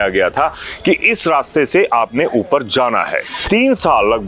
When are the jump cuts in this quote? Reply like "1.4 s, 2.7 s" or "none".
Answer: 3.3 s